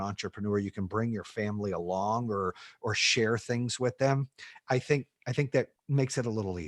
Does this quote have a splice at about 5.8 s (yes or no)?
yes